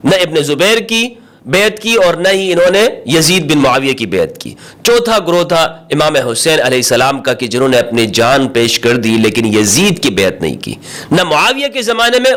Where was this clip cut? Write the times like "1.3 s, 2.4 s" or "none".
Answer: none